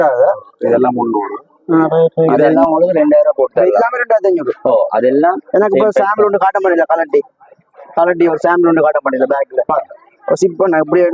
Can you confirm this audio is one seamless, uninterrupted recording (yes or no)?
no